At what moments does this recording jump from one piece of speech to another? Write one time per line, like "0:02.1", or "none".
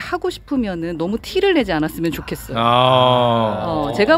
none